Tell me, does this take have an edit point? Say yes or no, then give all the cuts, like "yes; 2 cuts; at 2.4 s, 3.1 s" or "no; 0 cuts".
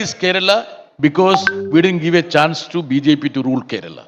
no; 0 cuts